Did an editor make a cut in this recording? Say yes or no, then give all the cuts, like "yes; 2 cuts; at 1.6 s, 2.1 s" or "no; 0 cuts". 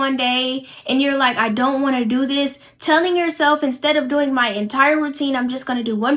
no; 0 cuts